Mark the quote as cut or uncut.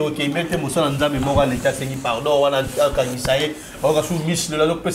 uncut